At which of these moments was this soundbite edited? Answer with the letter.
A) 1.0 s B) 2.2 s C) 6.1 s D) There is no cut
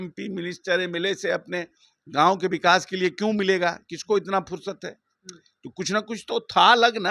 D